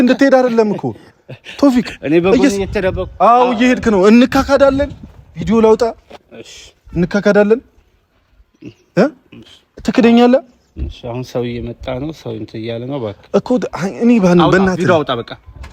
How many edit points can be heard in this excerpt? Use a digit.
0